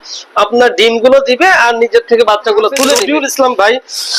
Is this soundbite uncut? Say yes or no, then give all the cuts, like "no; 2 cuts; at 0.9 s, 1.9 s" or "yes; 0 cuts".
no; 1 cut; at 3.1 s